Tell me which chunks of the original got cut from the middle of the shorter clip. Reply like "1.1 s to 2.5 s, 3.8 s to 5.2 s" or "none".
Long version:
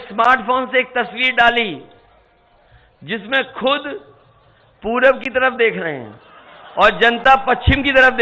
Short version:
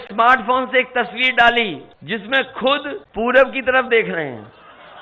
1.9 s to 2.9 s, 4.0 s to 4.7 s

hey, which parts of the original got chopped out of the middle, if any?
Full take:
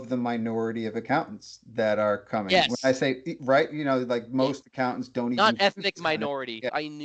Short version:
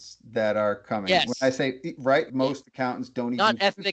3.7 s to 4.3 s

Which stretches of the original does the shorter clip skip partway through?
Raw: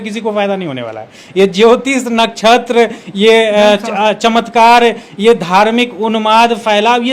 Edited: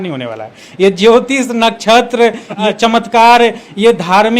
3.1 s to 3.9 s

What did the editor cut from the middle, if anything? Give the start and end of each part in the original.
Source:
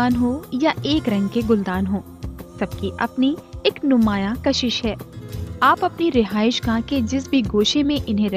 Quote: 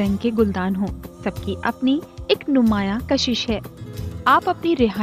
2.2 s to 2.4 s

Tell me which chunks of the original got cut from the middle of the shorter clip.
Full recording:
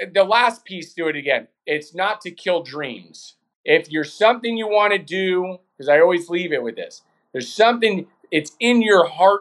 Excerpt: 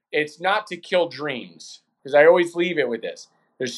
3.4 s to 5.6 s

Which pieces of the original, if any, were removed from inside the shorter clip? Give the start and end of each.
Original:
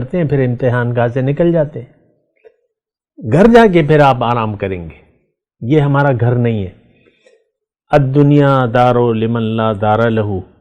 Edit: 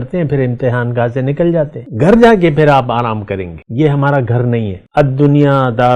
1.8 s to 3.1 s, 4.9 s to 5.5 s, 6.7 s to 7.7 s

